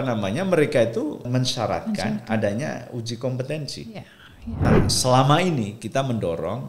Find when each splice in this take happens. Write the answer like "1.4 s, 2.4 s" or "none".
1.3 s, 4.7 s